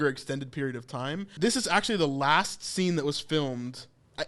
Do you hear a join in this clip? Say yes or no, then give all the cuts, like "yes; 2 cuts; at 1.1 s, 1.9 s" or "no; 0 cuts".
yes; 1 cut; at 1.3 s